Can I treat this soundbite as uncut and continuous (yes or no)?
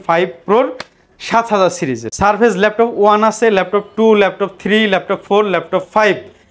no